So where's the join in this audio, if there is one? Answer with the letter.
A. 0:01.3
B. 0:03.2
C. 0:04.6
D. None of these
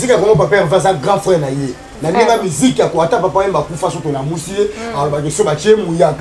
D